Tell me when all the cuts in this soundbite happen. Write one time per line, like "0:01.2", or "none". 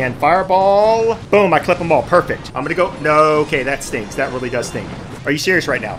0:01.2
0:02.4
0:05.0